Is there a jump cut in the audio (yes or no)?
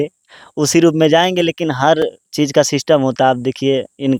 no